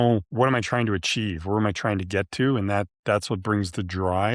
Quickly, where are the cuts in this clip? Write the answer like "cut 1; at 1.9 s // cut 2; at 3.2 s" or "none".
none